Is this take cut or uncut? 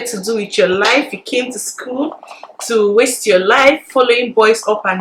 uncut